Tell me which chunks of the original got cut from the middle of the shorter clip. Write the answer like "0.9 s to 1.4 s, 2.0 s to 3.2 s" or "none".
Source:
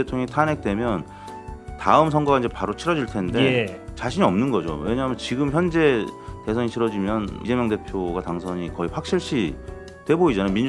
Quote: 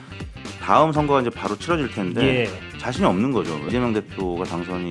4.8 s to 7.4 s